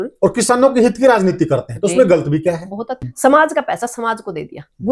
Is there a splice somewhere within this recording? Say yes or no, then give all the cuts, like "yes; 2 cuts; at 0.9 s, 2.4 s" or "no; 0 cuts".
yes; 1 cut; at 3.0 s